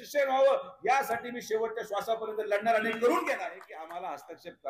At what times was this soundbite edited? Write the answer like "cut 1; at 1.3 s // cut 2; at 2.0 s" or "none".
cut 1; at 3.8 s